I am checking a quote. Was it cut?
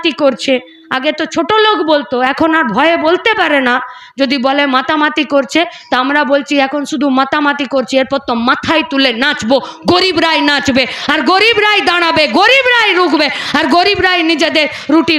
no; 0 cuts

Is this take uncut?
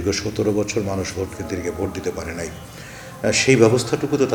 yes; 0 cuts

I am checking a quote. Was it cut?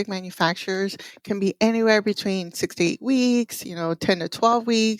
no; 0 cuts

